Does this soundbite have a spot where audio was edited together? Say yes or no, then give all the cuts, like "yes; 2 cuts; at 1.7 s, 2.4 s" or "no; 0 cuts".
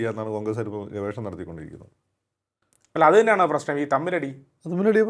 no; 0 cuts